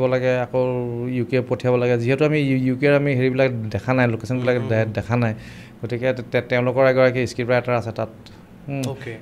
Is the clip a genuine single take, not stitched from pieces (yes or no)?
yes